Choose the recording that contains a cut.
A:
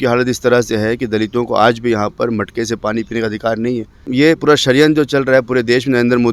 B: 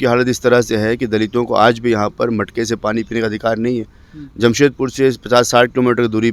A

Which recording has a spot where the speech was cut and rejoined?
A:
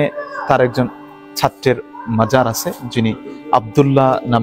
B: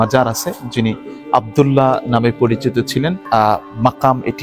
B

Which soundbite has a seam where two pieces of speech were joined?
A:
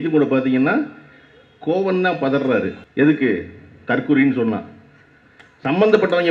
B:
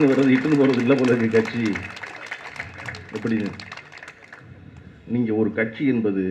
A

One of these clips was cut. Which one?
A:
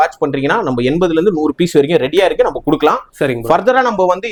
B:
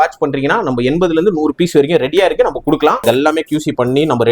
B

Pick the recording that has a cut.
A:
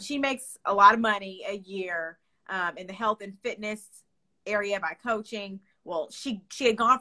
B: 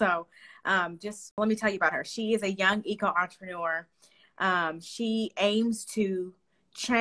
B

